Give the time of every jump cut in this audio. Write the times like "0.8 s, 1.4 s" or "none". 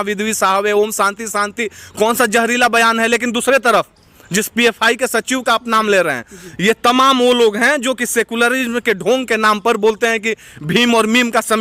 none